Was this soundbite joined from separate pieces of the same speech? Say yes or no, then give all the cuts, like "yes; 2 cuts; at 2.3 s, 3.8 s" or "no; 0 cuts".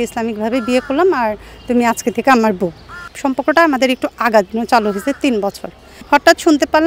yes; 2 cuts; at 3.1 s, 6.0 s